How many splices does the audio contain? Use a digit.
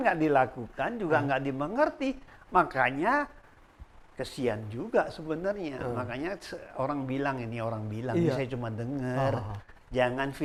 0